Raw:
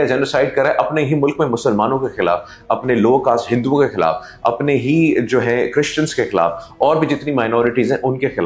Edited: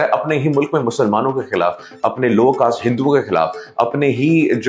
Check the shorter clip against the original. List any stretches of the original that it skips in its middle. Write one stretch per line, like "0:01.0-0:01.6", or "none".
none